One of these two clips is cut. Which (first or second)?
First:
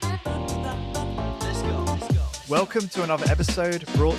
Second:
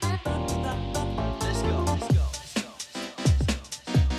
first